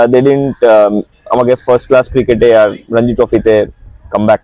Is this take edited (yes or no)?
no